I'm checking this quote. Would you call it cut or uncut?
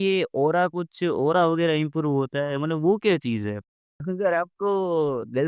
cut